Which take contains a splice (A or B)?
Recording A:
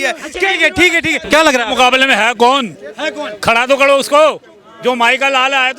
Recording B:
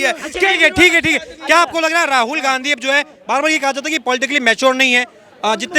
A